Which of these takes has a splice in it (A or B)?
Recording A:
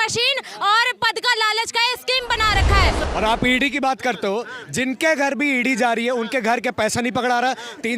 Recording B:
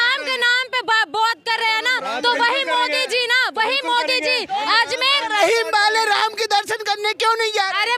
A